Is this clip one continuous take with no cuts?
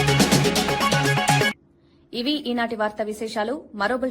yes; 0 cuts

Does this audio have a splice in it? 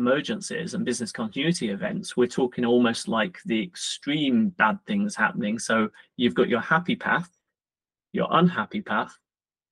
no; 0 cuts

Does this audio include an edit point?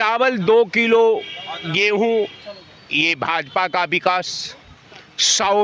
no; 0 cuts

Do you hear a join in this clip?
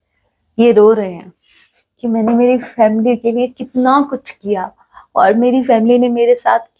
no; 0 cuts

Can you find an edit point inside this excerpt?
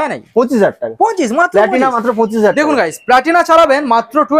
no; 0 cuts

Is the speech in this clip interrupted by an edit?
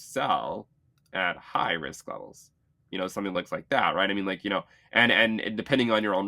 no; 0 cuts

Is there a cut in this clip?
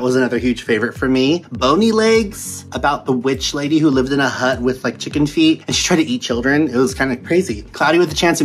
no; 0 cuts

